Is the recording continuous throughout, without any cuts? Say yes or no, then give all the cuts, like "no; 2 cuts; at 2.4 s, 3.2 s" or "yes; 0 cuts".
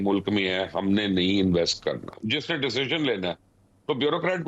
no; 1 cut; at 2.2 s